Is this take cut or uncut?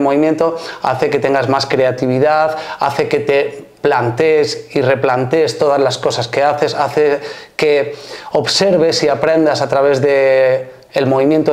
uncut